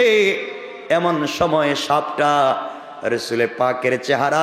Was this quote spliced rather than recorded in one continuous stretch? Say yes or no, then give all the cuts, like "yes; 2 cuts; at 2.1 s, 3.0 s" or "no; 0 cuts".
no; 0 cuts